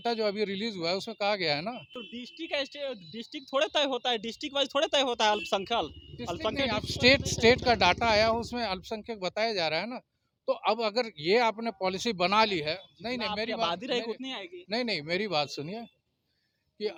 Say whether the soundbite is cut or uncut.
uncut